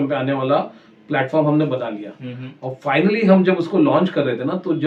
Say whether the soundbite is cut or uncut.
uncut